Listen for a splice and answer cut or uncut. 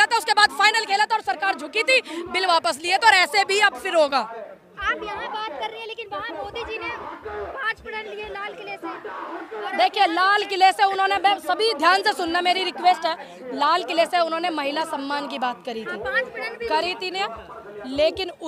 uncut